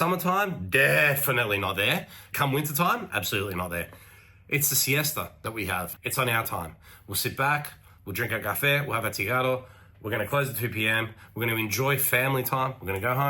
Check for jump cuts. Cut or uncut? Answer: cut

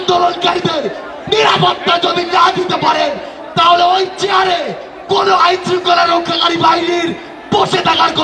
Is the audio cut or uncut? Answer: uncut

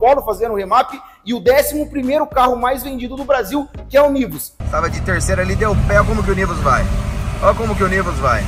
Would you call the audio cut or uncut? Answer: cut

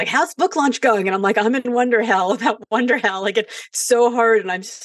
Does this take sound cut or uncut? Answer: uncut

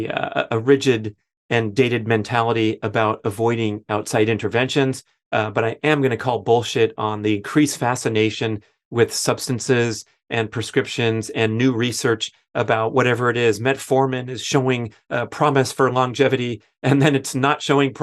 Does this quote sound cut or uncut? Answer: uncut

